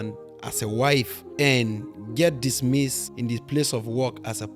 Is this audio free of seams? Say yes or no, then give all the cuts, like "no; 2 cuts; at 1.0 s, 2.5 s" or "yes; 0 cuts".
no; 2 cuts; at 1.2 s, 3.0 s